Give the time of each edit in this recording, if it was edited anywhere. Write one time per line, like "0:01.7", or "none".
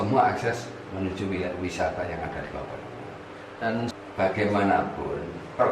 0:03.9